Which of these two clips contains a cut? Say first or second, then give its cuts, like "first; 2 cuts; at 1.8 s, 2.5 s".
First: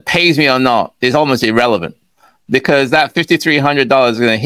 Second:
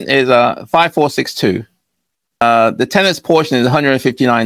second; 1 cut; at 2.4 s